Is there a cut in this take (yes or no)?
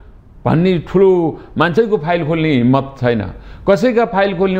yes